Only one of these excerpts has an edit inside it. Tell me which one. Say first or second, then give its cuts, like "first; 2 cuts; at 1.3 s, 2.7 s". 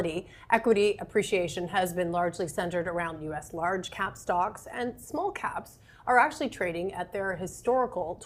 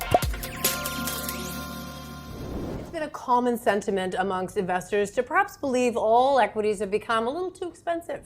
second; 1 cut; at 2.9 s